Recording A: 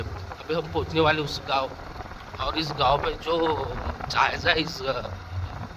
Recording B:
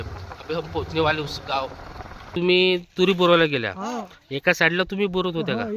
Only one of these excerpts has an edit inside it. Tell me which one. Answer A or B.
B